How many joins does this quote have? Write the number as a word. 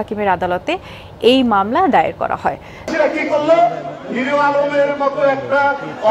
one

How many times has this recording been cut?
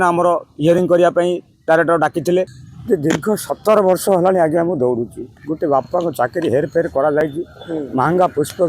two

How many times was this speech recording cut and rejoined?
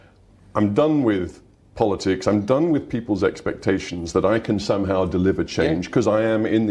zero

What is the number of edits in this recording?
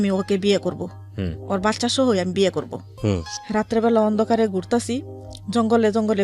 one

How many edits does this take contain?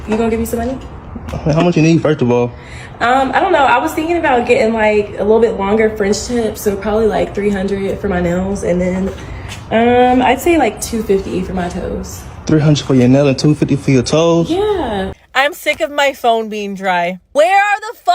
one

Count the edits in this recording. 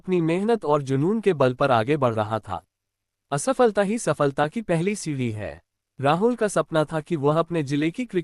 one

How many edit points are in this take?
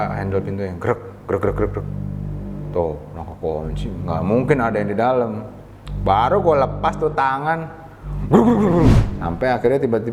one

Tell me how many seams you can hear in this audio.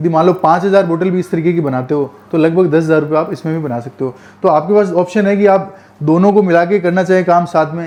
zero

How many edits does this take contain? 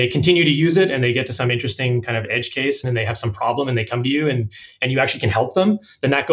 one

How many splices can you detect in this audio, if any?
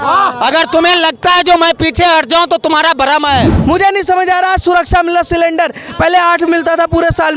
one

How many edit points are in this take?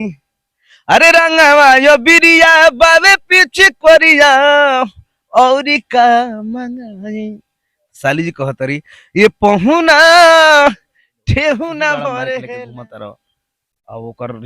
one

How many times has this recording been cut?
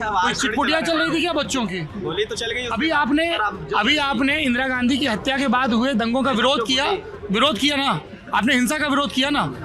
zero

